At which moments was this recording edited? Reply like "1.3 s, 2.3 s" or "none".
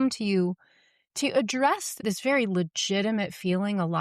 2.0 s